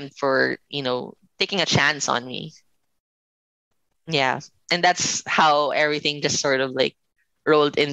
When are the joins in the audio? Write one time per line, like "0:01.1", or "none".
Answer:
0:01.2